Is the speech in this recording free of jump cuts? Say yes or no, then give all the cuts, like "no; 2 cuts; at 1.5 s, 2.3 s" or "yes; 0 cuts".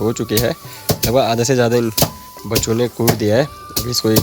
yes; 0 cuts